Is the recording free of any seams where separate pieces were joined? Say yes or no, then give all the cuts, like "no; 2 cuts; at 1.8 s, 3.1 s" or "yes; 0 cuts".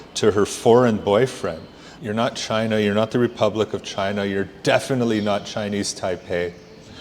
no; 1 cut; at 1.9 s